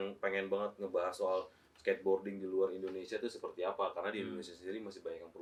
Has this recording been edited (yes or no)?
no